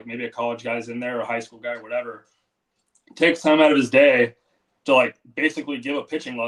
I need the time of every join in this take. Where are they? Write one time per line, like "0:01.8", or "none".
none